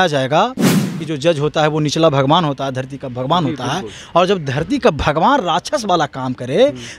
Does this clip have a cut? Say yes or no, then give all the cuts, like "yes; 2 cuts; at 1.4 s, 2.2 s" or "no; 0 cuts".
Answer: yes; 1 cut; at 1.0 s